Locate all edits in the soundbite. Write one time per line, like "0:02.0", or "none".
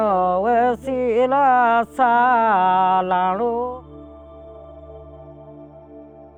none